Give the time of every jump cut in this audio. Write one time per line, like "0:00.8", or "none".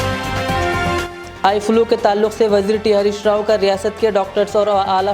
0:01.1